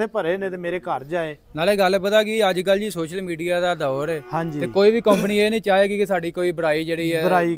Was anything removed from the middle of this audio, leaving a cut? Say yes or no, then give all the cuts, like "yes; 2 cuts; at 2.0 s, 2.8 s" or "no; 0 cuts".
yes; 1 cut; at 1.4 s